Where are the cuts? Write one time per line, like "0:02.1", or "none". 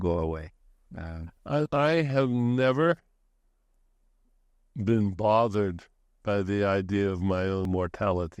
0:01.7
0:07.6